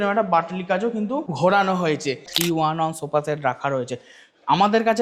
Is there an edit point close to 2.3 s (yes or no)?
yes